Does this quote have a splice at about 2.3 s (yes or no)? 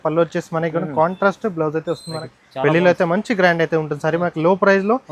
yes